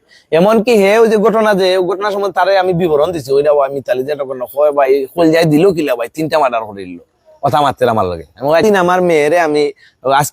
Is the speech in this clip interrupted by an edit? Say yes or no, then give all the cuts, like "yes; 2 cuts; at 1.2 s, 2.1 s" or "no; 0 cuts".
yes; 1 cut; at 8.6 s